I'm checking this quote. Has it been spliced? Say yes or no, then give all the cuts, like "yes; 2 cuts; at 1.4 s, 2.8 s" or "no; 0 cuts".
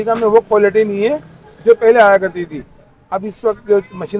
no; 0 cuts